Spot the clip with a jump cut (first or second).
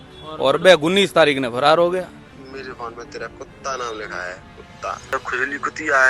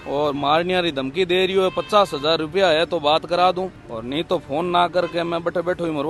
first